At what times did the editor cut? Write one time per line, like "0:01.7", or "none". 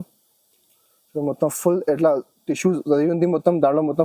none